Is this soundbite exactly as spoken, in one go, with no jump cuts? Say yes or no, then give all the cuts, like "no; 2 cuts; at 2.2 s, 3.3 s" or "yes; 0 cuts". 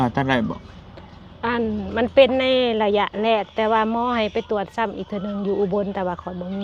yes; 0 cuts